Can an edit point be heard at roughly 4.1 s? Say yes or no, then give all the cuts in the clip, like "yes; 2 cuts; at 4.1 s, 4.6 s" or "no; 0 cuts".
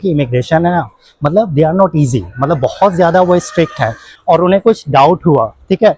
yes; 1 cut; at 4.1 s